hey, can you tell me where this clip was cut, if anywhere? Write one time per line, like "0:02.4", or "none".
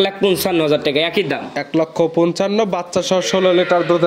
none